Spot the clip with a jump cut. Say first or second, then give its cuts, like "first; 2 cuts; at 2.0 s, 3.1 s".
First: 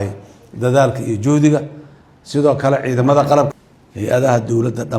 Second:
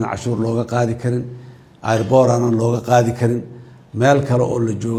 first; 1 cut; at 3.6 s